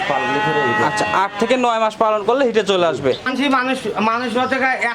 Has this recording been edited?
yes; 1 cut; at 3.3 s

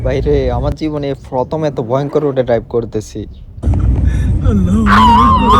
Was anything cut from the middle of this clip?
yes; 1 cut; at 3.7 s

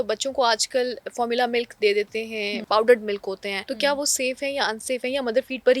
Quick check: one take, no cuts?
no; 2 cuts; at 2.6 s, 3.6 s

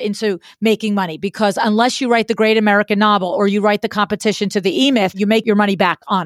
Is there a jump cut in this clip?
yes; 1 cut; at 5.2 s

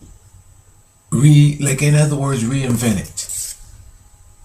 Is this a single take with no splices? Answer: no; 1 cut; at 2.1 s

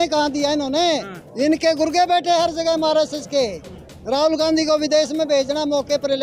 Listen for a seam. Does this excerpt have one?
no; 0 cuts

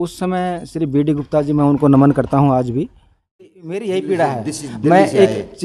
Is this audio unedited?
no; 1 cut; at 3.6 s

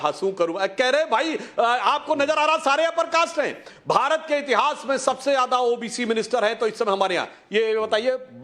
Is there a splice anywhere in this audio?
yes; 1 cut; at 3.9 s

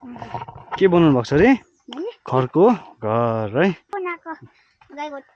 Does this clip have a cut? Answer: yes; 1 cut; at 4.0 s

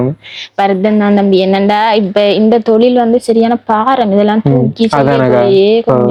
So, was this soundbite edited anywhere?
no; 0 cuts

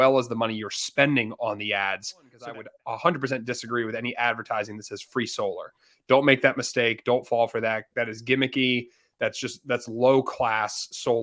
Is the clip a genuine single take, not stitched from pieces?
no; 1 cut; at 2.5 s

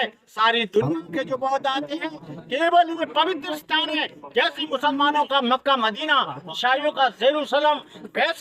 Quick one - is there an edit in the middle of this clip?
no; 0 cuts

